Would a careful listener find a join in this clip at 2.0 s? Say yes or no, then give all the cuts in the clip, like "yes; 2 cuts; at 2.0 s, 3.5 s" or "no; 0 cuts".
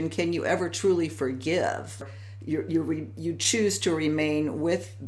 yes; 1 cut; at 2.0 s